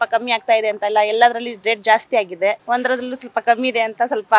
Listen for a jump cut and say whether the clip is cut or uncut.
uncut